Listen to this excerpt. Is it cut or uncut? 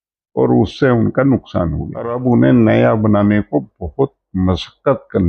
cut